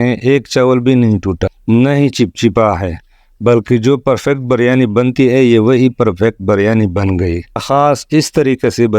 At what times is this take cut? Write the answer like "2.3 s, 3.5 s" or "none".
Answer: 1.5 s, 7.6 s